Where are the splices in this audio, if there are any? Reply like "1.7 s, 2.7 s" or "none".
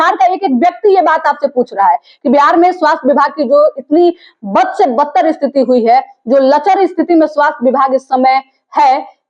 none